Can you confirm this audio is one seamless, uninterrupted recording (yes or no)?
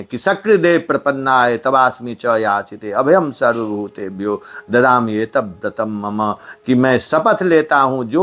yes